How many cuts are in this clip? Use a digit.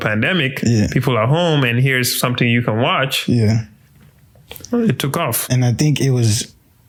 0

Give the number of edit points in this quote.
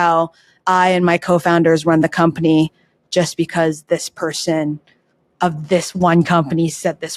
0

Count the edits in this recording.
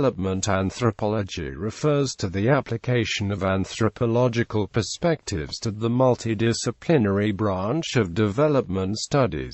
1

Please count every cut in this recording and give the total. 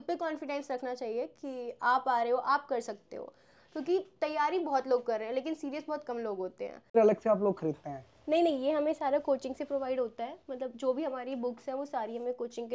1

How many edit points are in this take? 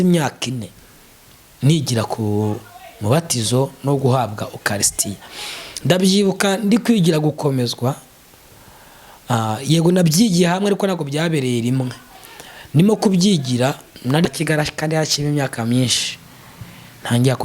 1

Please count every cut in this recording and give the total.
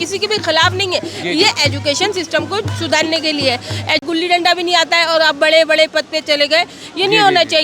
1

